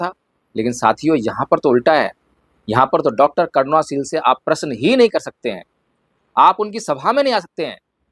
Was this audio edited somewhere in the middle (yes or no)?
no